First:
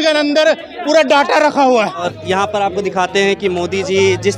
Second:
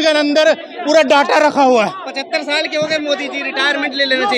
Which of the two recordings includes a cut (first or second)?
first